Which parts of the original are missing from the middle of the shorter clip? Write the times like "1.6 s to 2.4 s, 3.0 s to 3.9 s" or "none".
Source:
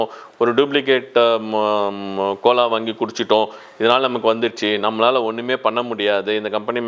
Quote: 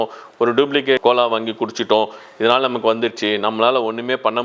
1.0 s to 2.4 s